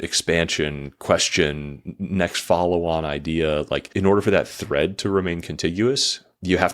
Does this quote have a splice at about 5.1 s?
no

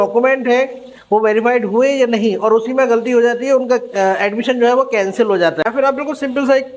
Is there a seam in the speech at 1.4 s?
no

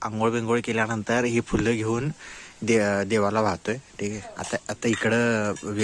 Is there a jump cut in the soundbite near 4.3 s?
yes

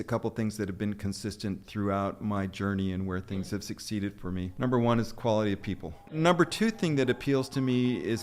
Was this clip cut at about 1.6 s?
no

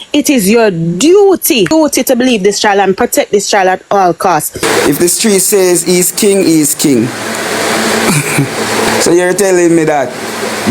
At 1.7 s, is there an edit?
yes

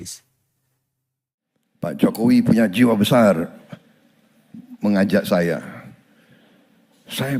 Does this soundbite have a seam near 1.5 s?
yes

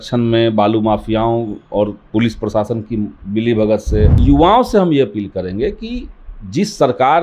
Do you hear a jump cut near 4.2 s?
yes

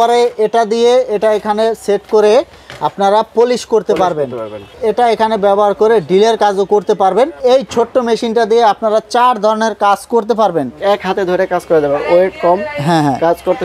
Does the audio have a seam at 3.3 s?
no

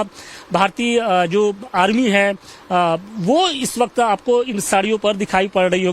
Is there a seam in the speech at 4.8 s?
no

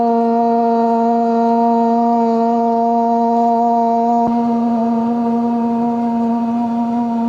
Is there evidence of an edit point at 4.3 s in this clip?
yes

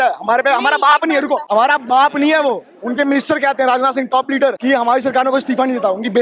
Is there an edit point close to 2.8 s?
yes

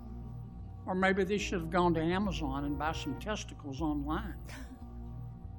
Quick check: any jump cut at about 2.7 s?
no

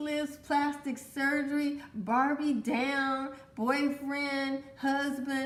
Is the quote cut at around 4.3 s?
no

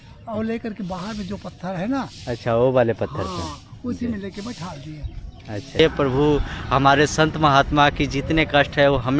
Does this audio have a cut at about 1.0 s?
no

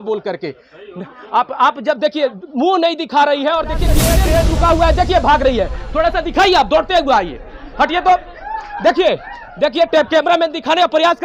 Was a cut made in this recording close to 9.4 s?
no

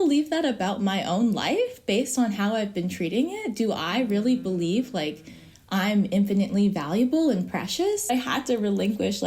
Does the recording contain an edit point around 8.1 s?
yes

